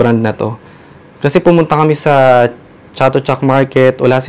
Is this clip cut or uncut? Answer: uncut